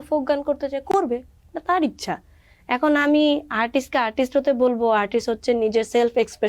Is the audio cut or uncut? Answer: uncut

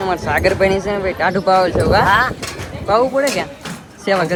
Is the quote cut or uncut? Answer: uncut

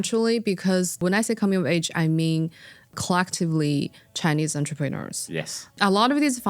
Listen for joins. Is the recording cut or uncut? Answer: cut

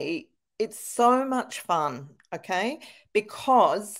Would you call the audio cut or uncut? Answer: uncut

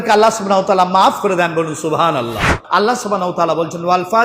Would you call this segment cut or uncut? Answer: cut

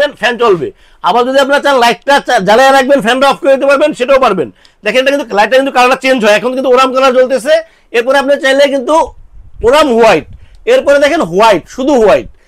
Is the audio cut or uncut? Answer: uncut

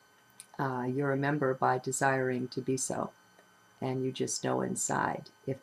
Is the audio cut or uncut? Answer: uncut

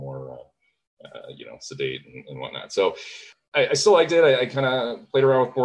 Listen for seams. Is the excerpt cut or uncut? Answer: cut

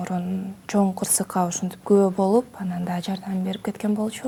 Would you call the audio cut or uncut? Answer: uncut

